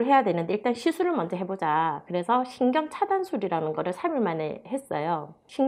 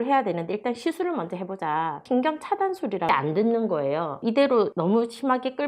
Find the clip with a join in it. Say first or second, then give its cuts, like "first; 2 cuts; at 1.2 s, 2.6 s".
second; 3 cuts; at 2.0 s, 3.1 s, 4.6 s